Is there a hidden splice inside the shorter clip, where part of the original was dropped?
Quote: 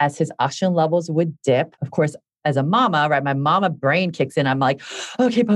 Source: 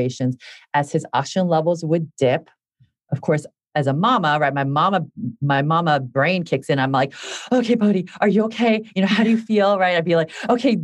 yes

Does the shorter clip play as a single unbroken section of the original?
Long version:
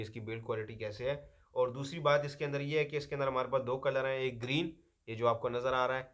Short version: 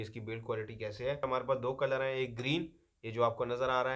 no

